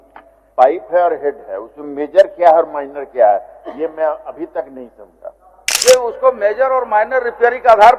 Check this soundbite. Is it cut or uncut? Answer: cut